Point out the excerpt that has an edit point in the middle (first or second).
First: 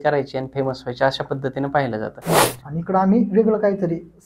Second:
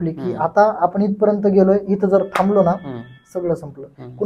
first